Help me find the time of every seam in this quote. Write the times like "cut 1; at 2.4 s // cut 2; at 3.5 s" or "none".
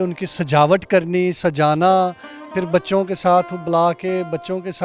none